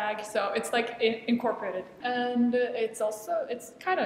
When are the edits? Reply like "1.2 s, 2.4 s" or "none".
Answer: 1.9 s